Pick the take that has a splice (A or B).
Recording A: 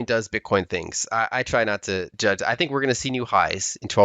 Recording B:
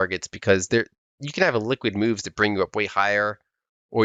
A